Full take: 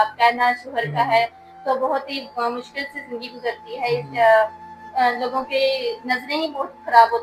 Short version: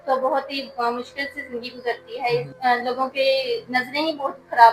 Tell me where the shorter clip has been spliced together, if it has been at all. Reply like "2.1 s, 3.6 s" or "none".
2.5 s